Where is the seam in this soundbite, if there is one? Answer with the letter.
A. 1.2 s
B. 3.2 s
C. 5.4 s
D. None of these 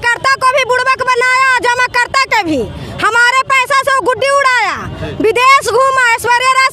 D